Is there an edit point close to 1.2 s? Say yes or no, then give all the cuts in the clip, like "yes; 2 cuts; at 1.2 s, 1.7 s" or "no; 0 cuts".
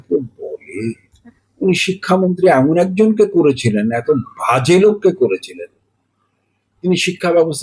yes; 1 cut; at 1.2 s